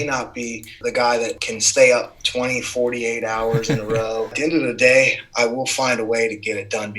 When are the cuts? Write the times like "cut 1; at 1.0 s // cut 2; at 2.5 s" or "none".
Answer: cut 1; at 0.8 s // cut 2; at 1.5 s // cut 3; at 4.4 s